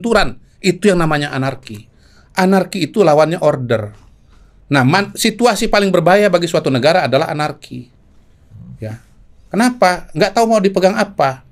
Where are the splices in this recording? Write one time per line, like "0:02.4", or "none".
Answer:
none